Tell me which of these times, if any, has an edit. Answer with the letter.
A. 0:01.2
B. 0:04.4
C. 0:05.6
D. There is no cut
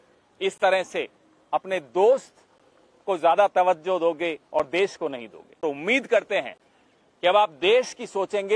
C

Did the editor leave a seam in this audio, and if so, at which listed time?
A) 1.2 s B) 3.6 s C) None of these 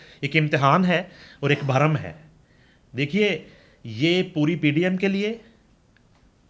C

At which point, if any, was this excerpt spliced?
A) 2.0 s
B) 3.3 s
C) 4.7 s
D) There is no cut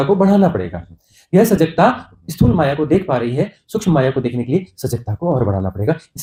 D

